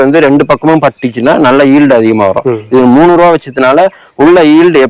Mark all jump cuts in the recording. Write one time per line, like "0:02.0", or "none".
none